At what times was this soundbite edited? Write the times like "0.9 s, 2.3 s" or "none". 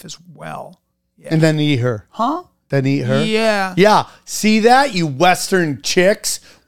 none

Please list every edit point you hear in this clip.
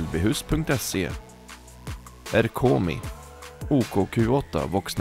none

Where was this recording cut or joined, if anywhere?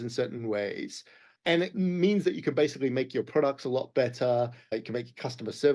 1.5 s, 4.7 s

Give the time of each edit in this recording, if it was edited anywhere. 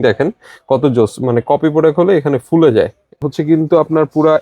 3.2 s

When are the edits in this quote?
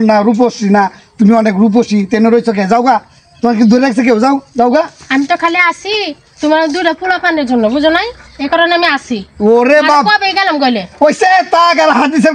none

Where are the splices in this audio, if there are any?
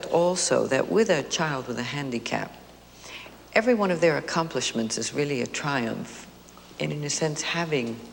none

